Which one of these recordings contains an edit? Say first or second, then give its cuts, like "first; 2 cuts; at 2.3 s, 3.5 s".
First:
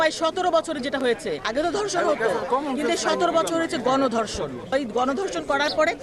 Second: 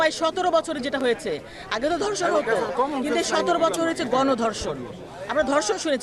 first; 2 cuts; at 1.4 s, 4.7 s